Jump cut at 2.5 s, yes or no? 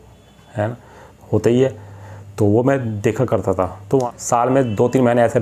no